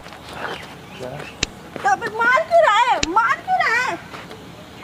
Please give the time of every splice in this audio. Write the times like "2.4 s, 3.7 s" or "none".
none